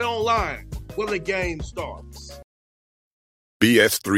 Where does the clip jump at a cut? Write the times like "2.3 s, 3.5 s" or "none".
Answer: 2.3 s